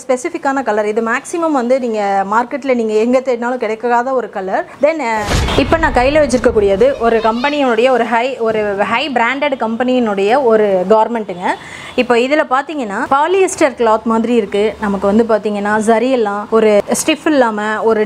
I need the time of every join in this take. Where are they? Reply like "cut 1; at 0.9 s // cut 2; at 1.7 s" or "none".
cut 1; at 5.3 s